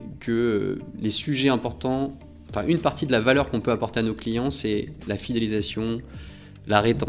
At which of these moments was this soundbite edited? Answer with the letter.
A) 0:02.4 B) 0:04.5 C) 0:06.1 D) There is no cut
D